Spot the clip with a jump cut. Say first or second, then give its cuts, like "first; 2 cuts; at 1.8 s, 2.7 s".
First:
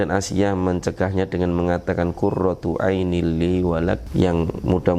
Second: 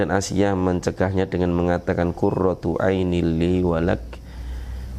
first; 1 cut; at 4.0 s